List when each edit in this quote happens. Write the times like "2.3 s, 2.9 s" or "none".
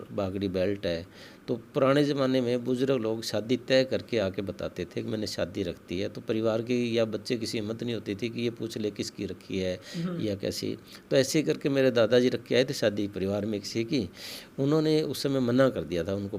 none

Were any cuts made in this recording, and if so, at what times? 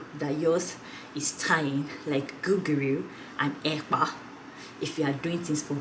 none

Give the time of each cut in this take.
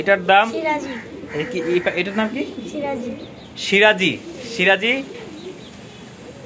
none

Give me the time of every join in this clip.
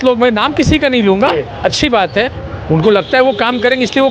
2.4 s

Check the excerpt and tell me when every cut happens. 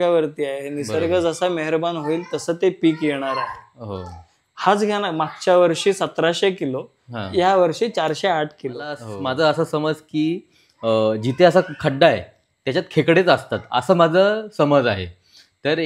9.1 s

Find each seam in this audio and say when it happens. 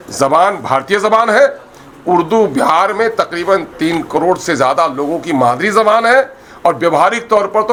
none

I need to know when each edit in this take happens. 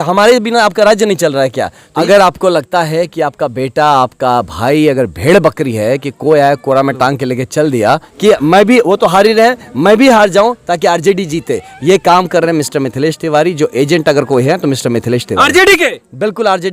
2.0 s, 8.1 s

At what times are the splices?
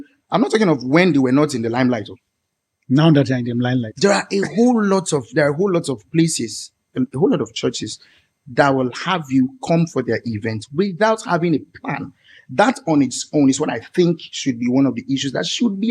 none

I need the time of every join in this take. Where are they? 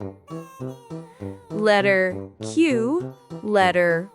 none

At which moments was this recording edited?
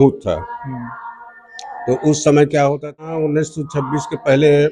3.0 s

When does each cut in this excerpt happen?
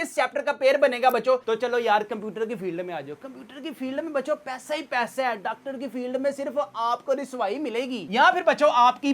1.4 s, 8.0 s

